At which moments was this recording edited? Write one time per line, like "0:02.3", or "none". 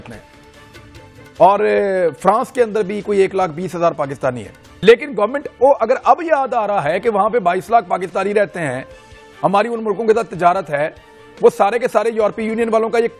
none